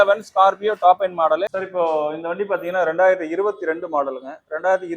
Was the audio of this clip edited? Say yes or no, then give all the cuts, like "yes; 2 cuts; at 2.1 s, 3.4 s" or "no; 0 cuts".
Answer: yes; 1 cut; at 1.6 s